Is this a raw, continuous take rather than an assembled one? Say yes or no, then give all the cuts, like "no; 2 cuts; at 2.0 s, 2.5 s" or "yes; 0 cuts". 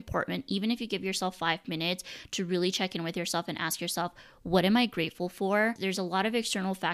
no; 1 cut; at 5.8 s